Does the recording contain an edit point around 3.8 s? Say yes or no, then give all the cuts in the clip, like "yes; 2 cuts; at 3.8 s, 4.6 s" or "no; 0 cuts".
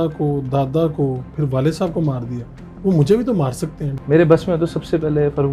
yes; 1 cut; at 3.8 s